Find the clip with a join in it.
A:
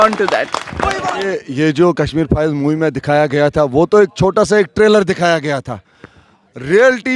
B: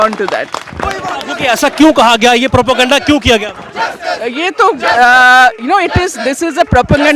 A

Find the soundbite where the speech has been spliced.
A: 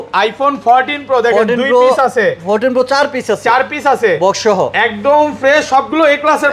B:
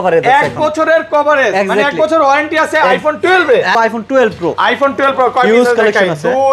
B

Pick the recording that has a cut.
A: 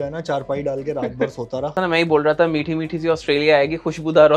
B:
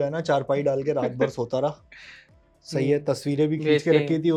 A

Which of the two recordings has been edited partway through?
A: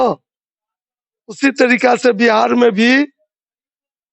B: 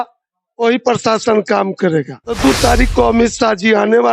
B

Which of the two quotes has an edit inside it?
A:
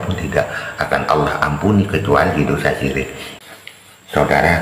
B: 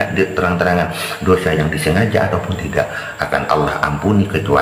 A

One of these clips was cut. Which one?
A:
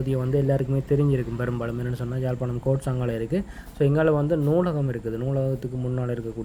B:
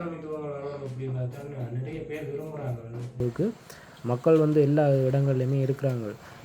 B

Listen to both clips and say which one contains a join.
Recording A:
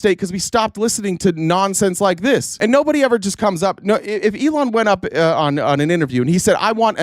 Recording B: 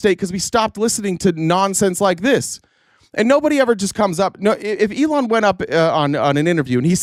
A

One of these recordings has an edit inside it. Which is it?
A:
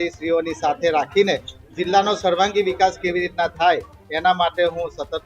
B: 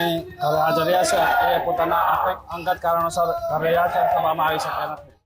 A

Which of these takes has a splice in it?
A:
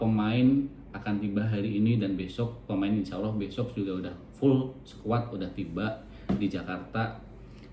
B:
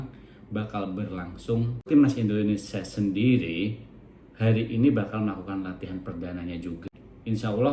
B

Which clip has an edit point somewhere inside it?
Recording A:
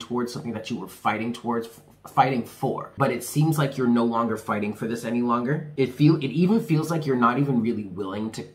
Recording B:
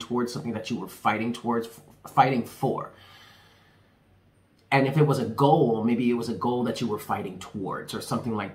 A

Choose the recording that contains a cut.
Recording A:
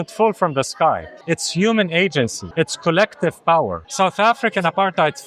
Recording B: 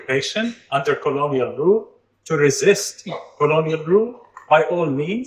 A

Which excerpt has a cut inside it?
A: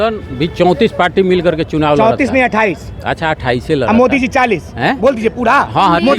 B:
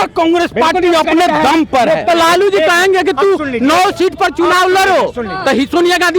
B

